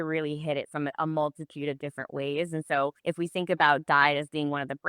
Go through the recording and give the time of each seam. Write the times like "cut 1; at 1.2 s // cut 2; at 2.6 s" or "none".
cut 1; at 3.0 s